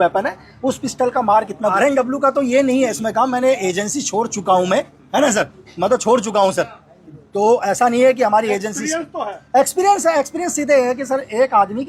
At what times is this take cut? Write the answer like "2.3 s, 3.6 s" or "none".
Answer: 1.7 s